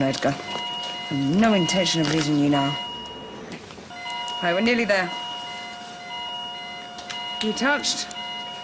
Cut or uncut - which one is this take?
cut